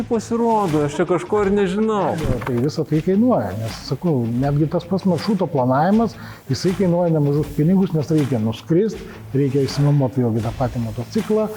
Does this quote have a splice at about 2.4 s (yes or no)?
yes